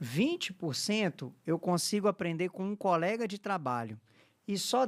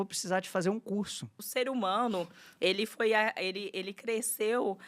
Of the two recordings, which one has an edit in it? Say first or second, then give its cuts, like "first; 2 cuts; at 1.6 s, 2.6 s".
second; 1 cut; at 1.4 s